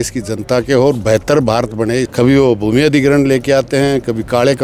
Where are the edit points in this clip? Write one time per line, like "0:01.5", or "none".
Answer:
0:02.1